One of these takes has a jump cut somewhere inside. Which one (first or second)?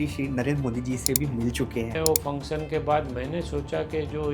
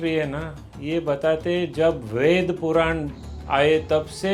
first